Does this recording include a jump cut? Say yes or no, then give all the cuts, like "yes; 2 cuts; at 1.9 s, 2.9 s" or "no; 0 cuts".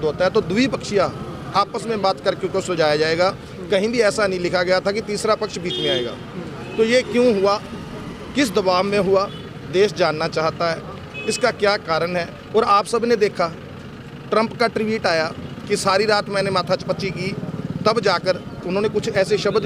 no; 0 cuts